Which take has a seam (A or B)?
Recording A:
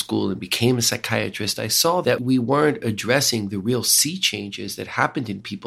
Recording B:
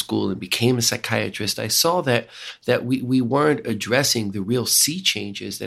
A